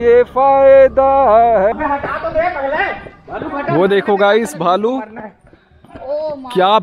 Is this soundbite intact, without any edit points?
no; 1 cut; at 1.7 s

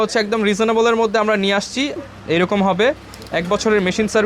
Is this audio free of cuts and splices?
no; 1 cut; at 2.0 s

